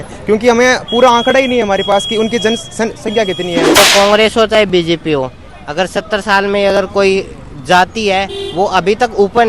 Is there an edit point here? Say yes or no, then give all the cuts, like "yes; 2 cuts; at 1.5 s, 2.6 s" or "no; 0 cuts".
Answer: yes; 1 cut; at 3.8 s